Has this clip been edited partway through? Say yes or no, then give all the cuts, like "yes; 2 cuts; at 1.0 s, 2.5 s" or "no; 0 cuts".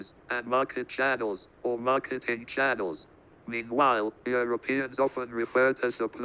yes; 1 cut; at 1.1 s